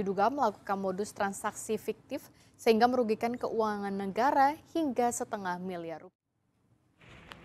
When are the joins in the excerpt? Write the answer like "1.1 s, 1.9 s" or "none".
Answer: 6.0 s